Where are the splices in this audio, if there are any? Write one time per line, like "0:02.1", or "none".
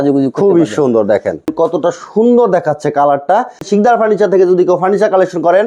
0:01.5
0:03.7